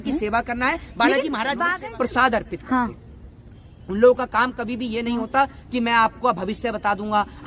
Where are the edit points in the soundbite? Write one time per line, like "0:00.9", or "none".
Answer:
0:01.7